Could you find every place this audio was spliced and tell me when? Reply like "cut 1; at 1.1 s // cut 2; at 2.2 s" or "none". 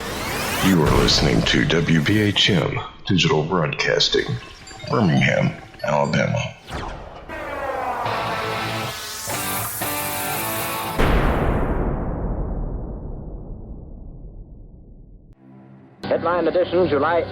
cut 1; at 15.3 s